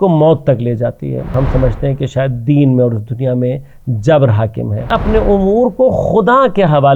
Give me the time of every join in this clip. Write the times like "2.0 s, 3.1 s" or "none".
1.3 s, 4.9 s